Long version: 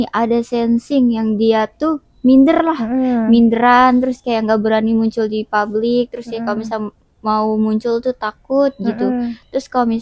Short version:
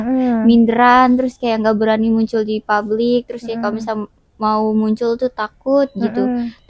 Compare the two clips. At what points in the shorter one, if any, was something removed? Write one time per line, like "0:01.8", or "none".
none